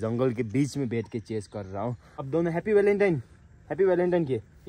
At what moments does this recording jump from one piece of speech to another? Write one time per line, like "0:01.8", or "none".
0:02.1